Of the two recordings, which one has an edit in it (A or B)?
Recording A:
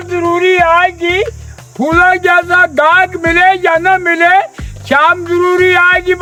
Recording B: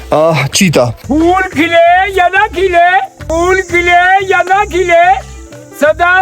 B